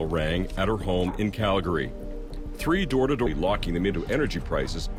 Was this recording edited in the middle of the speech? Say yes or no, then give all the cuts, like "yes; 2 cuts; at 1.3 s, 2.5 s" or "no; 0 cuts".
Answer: no; 0 cuts